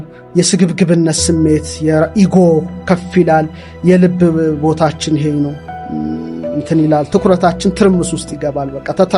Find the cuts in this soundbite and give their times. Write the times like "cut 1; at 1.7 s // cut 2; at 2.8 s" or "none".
none